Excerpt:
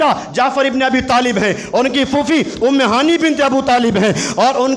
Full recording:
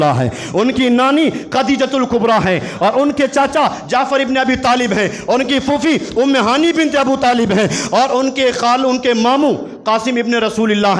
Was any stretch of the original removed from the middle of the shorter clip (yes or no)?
no